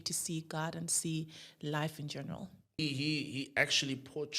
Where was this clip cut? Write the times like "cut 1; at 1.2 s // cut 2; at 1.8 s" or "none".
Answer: cut 1; at 2.8 s

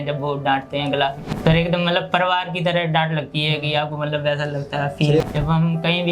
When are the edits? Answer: cut 1; at 1.3 s // cut 2; at 5.2 s

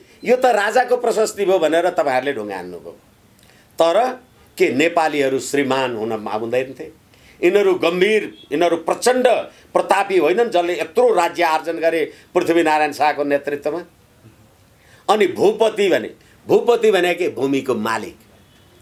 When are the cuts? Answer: none

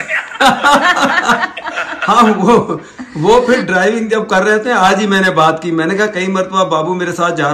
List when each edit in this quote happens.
none

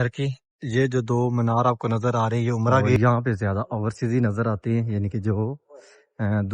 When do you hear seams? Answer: cut 1; at 3.0 s

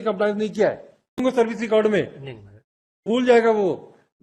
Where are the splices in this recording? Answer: cut 1; at 1.2 s // cut 2; at 3.1 s

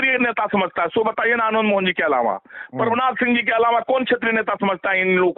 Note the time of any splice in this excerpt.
none

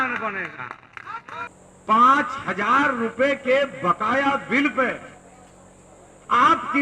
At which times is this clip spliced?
cut 1; at 1.5 s

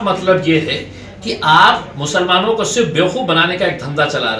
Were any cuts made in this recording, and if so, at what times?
none

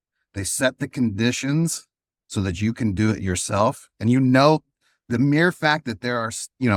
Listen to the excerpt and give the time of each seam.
none

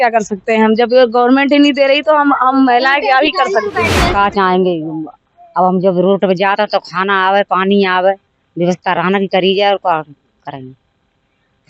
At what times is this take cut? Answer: cut 1; at 3.9 s

